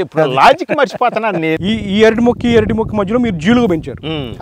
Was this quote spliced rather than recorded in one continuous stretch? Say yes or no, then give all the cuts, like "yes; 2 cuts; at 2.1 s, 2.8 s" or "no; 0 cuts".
yes; 1 cut; at 1.6 s